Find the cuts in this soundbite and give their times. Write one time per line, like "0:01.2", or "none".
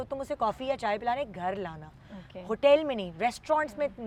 none